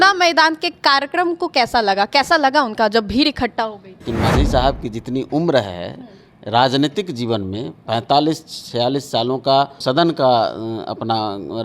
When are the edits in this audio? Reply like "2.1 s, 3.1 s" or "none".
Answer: 4.0 s